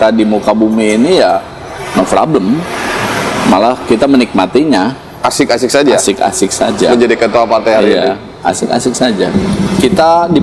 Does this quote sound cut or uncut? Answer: cut